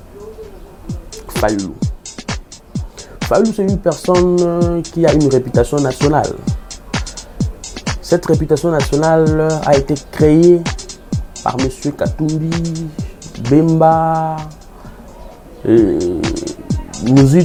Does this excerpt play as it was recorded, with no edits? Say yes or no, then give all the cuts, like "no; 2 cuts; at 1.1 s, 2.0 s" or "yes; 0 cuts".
yes; 0 cuts